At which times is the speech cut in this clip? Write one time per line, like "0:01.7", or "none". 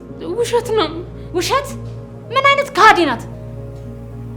0:01.1